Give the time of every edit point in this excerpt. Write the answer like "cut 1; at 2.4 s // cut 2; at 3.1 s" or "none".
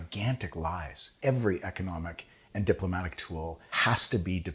cut 1; at 1.1 s